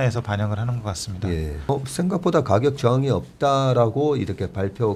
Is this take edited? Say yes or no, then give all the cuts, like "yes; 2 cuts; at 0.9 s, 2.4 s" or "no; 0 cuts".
yes; 1 cut; at 1.7 s